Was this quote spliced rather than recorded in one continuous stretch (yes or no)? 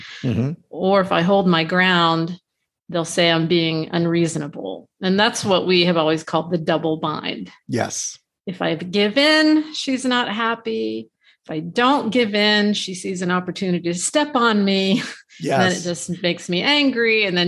no